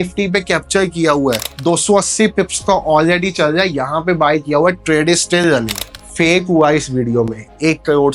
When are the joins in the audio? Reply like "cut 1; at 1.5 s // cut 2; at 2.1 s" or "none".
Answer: cut 1; at 1.5 s // cut 2; at 5.9 s